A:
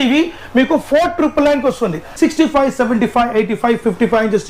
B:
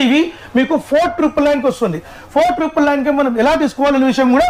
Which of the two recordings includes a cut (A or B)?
A